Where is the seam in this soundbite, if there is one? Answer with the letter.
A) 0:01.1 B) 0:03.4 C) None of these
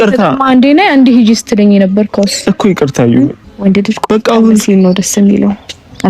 B